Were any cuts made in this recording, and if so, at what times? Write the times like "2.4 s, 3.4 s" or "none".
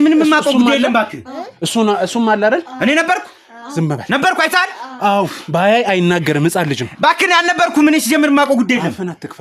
none